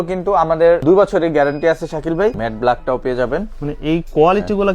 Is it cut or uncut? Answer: cut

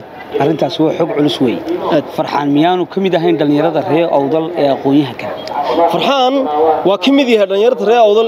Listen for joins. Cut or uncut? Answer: uncut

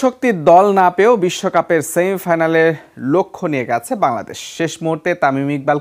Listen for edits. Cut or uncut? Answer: uncut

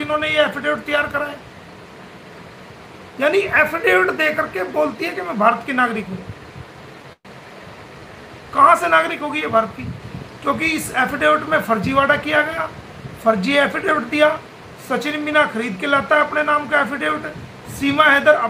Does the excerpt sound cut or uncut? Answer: uncut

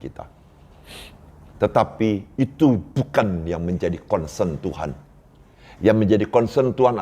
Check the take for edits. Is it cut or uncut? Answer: uncut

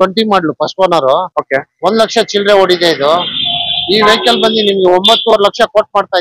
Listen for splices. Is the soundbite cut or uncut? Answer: uncut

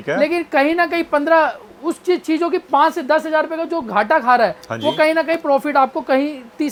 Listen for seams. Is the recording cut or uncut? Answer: uncut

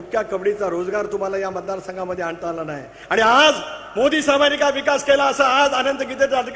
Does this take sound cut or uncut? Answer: uncut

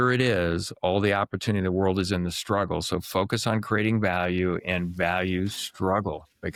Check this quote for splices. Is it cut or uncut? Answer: uncut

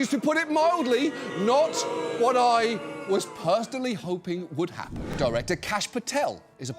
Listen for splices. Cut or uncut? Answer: cut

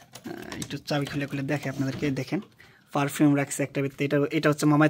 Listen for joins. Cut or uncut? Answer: uncut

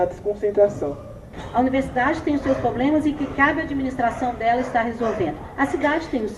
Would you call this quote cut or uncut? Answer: cut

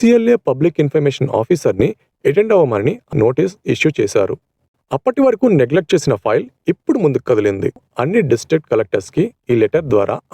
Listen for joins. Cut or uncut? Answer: cut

